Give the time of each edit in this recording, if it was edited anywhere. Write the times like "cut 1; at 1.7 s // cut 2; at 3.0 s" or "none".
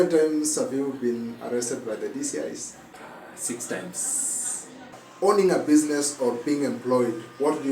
cut 1; at 2.9 s // cut 2; at 5.0 s